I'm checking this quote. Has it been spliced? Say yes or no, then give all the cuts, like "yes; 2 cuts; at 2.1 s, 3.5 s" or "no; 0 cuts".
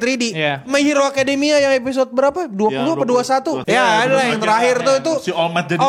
yes; 1 cut; at 3.6 s